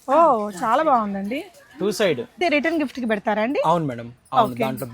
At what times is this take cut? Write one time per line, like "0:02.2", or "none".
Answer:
0:02.4